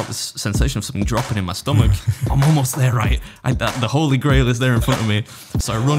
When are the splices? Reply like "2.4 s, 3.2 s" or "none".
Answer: 2.2 s